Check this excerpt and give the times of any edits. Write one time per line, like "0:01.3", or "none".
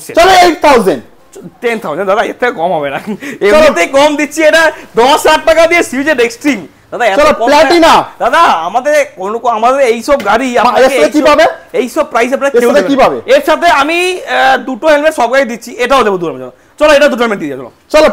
none